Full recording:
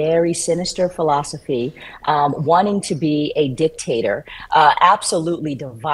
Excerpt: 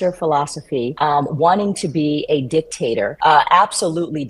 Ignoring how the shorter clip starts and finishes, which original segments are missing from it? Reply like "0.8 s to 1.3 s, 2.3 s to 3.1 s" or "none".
1.7 s to 2.0 s, 4.2 s to 4.4 s